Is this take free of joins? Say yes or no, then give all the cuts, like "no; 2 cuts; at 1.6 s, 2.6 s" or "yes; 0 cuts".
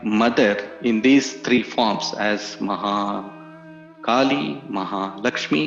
yes; 0 cuts